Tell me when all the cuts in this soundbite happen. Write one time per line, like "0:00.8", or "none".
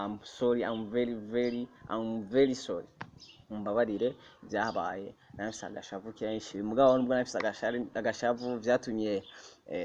none